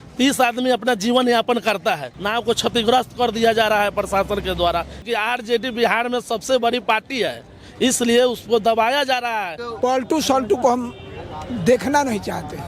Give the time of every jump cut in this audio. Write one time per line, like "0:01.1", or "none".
0:02.1
0:05.0
0:09.6